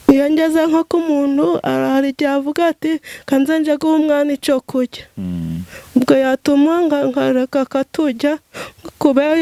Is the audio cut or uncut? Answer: uncut